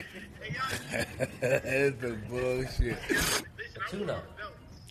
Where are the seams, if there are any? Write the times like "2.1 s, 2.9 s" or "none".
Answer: 3.5 s